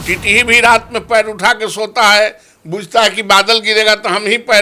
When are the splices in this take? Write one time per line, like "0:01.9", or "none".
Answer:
none